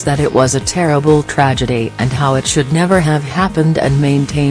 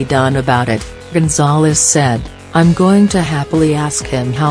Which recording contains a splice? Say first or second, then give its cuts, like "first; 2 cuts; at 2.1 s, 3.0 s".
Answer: second; 2 cuts; at 1.1 s, 2.4 s